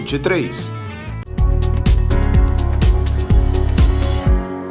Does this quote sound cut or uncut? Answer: cut